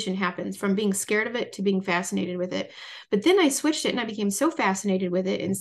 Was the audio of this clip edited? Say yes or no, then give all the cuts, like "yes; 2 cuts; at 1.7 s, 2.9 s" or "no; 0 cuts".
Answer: no; 0 cuts